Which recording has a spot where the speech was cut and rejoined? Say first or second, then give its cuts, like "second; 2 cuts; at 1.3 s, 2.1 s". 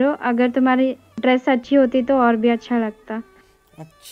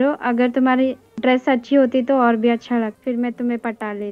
second; 1 cut; at 3.0 s